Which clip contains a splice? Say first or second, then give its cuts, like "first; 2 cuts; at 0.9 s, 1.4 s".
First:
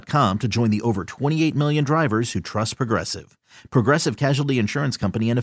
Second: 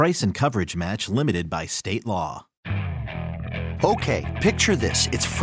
second; 1 cut; at 2.5 s